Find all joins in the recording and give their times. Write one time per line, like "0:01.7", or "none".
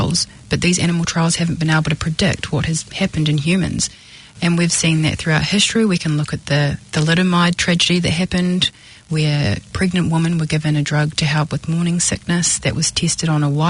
0:02.9